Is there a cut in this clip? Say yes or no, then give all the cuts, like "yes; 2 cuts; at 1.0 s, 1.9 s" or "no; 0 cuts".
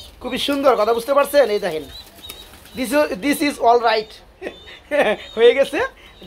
no; 0 cuts